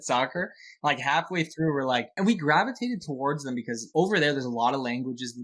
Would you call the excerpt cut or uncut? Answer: cut